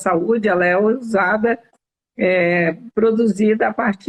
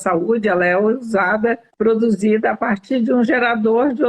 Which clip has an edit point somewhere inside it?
second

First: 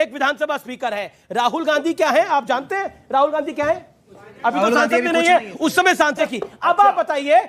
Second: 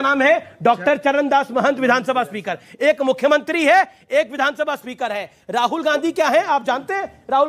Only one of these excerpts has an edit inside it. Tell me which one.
first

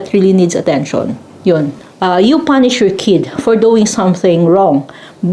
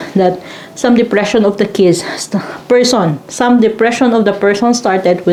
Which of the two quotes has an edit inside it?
first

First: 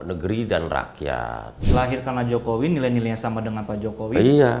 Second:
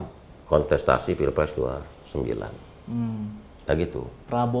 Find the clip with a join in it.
first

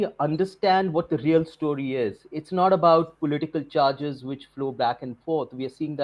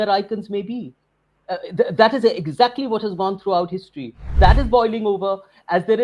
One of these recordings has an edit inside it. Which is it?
second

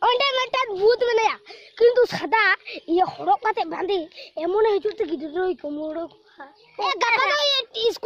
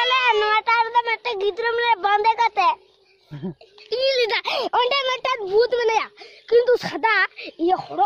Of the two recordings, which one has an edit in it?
first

